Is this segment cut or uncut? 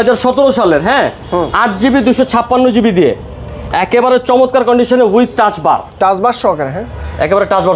uncut